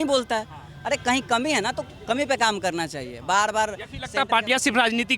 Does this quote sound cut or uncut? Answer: uncut